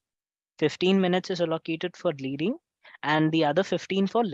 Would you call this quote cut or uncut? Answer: uncut